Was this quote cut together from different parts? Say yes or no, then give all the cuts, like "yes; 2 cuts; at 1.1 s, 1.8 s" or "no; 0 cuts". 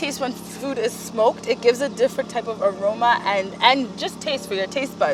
no; 0 cuts